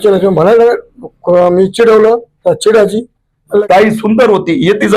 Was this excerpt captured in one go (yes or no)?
no